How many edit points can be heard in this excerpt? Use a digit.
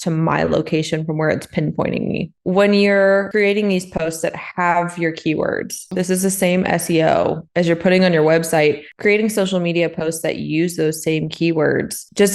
3